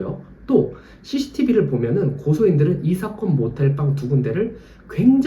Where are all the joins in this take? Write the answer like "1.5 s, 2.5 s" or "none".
none